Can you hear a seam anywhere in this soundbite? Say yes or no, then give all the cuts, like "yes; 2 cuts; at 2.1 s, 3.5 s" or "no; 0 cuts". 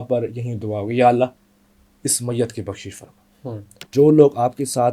yes; 1 cut; at 3.9 s